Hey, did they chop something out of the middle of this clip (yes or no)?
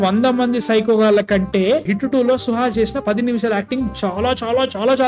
no